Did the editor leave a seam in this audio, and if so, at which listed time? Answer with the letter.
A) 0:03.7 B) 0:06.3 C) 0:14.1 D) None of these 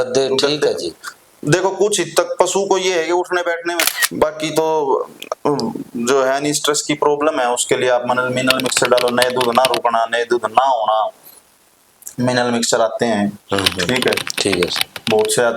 A